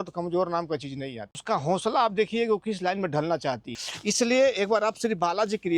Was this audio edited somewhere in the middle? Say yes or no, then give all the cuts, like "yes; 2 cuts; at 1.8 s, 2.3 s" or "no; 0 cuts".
yes; 1 cut; at 3.7 s